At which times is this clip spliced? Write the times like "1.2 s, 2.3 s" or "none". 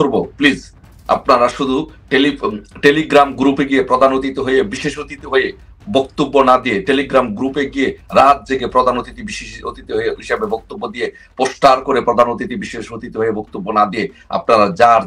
none